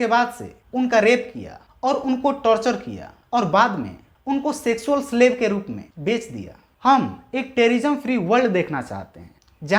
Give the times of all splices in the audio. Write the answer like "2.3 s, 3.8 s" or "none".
none